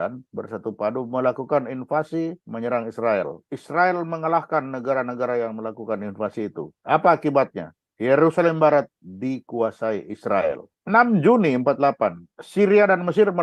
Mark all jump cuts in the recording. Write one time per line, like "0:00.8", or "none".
0:03.5
0:06.8
0:10.7